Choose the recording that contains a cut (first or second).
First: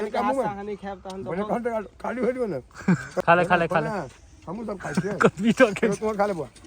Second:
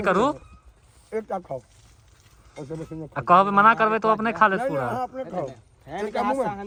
first